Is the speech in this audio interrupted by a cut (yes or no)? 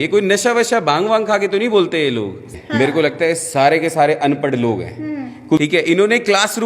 yes